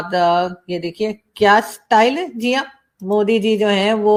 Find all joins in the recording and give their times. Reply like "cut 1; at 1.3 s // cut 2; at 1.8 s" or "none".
none